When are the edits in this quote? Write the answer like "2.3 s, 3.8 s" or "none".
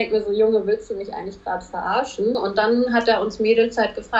2.4 s